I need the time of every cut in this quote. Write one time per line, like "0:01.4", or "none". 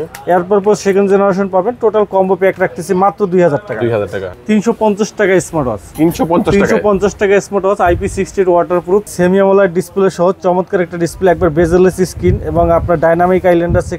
0:04.2
0:09.1